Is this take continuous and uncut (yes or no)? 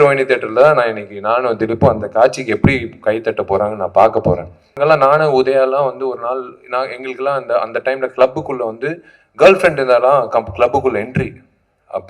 no